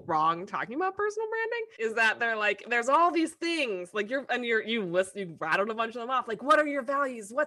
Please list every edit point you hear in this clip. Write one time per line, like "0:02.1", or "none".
0:01.8